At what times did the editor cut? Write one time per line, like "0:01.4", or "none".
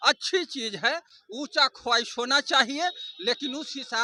none